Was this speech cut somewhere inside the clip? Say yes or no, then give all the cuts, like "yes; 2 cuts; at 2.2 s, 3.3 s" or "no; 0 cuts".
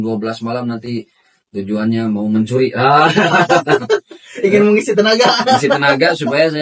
no; 0 cuts